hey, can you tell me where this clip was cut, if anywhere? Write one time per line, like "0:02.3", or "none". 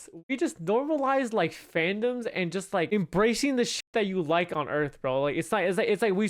0:02.9